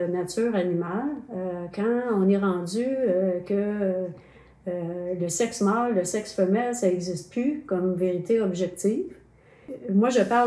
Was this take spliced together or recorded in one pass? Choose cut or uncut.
uncut